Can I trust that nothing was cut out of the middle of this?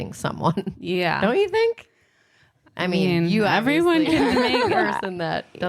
yes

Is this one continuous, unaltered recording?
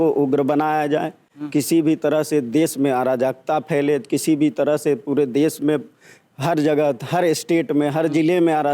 yes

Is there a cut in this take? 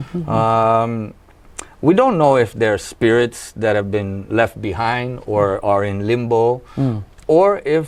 no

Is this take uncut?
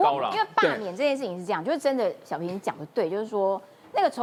yes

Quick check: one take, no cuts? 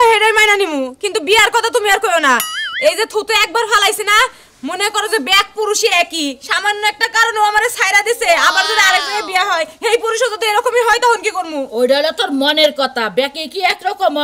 yes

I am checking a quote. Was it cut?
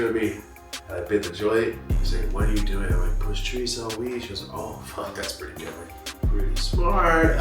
no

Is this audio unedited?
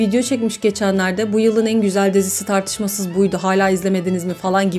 yes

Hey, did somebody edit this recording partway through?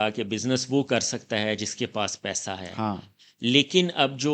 no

